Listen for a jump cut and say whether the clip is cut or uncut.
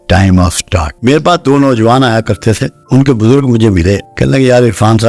cut